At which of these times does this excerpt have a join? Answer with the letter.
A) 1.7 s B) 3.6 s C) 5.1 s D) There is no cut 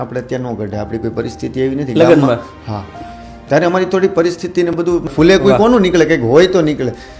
C